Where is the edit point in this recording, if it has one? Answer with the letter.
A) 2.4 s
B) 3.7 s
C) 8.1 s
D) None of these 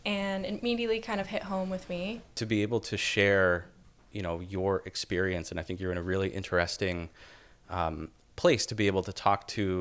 A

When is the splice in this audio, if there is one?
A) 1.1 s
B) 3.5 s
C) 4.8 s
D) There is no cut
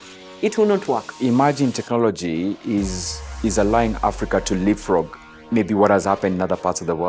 A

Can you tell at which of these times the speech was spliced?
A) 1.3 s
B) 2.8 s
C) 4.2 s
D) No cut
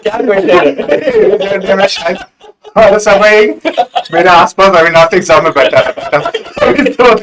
D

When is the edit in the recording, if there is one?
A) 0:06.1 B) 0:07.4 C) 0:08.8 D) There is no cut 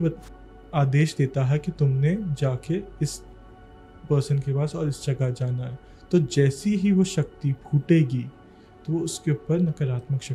D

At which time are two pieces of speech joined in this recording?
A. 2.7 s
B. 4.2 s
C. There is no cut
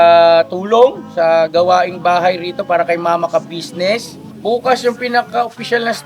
B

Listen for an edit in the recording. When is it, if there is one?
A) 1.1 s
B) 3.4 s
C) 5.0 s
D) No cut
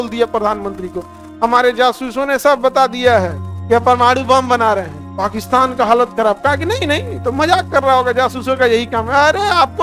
D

